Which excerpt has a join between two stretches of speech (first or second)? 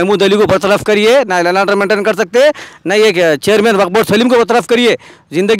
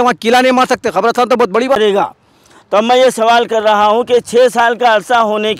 second